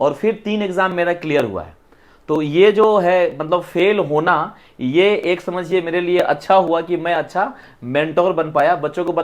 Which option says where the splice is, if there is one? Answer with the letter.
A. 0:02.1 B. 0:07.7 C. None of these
C